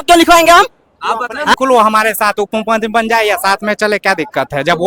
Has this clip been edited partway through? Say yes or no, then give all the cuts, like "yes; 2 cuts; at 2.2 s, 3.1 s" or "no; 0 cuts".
yes; 1 cut; at 1.5 s